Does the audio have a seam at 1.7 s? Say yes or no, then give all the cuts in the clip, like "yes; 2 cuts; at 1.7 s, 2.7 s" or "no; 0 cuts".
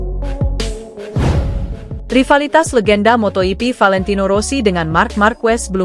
yes; 1 cut; at 1.7 s